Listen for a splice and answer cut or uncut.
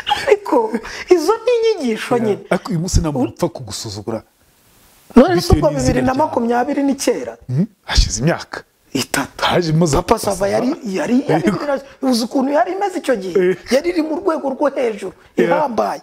uncut